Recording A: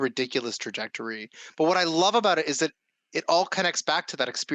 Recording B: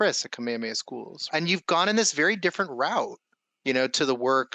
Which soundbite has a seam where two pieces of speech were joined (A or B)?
B